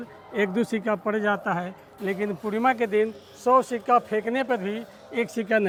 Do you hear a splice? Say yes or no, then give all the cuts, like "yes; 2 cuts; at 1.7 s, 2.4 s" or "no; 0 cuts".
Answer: no; 0 cuts